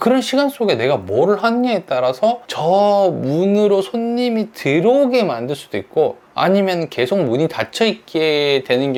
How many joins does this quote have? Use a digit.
0